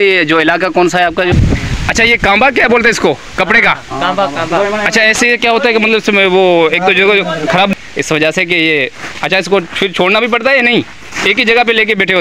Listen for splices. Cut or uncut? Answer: cut